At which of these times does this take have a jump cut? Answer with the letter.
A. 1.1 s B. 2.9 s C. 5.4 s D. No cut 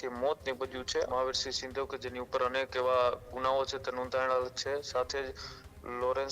A